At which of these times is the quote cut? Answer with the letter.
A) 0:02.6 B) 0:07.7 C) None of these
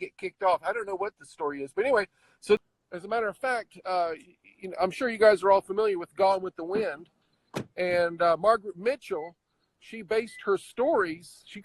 A